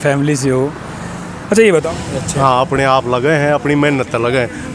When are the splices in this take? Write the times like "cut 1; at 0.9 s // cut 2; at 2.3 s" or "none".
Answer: cut 1; at 1.8 s